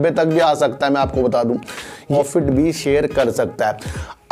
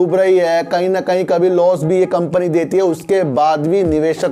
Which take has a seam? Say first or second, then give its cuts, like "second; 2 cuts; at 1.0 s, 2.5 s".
first; 1 cut; at 2.1 s